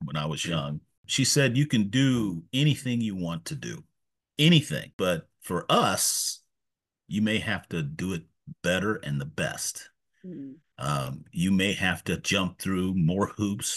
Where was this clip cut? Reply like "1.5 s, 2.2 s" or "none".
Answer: 1.0 s, 4.9 s